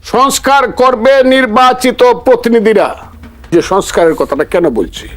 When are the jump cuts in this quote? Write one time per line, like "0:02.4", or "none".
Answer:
0:03.5